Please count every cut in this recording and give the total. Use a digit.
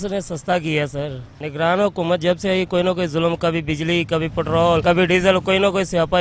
1